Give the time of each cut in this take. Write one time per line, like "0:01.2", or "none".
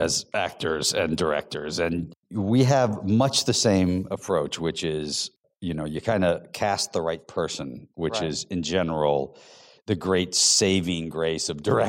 0:02.1
0:05.3

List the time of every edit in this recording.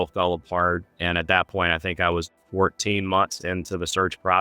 0:02.4

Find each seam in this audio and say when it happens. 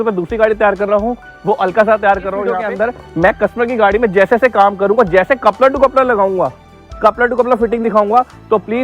0:02.6

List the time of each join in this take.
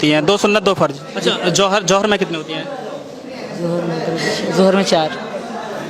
0:01.1

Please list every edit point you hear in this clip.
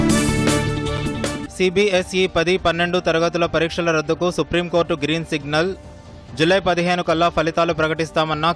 none

